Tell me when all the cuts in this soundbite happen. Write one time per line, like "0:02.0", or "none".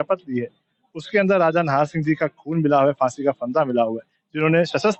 none